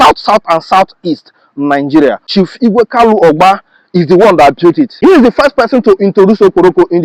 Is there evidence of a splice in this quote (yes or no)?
no